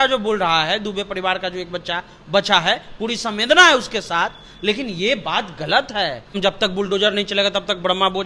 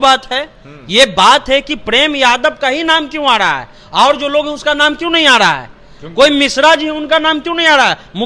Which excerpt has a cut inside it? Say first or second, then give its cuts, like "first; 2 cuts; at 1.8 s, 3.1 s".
first; 1 cut; at 6.4 s